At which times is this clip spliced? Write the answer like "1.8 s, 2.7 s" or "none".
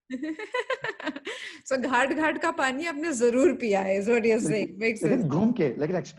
none